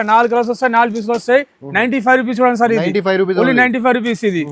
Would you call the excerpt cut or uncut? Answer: uncut